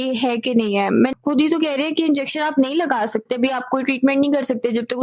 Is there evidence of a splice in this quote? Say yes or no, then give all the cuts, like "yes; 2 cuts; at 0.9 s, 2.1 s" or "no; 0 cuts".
yes; 1 cut; at 1.1 s